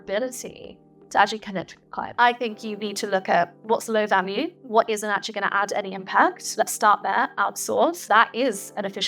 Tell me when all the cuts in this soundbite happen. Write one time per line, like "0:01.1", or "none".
0:02.0
0:04.6
0:06.4
0:08.0

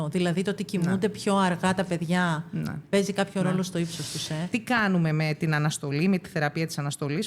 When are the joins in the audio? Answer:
0:04.4

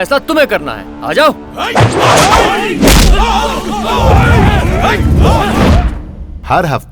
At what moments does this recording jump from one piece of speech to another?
none

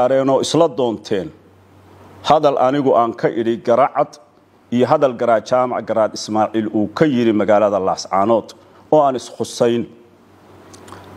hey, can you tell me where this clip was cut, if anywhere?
none

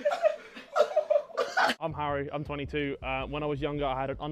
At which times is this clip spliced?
0:01.8

